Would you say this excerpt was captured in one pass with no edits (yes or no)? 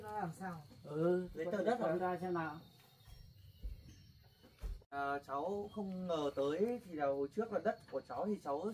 yes